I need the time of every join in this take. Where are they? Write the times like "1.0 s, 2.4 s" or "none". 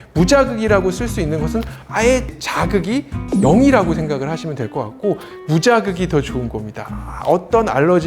2.4 s, 5.4 s